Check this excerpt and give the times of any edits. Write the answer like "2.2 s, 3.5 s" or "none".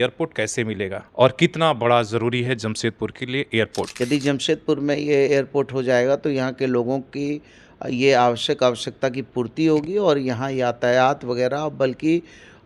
1.0 s, 3.9 s